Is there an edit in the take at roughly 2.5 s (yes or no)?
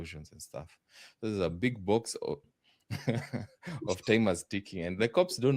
yes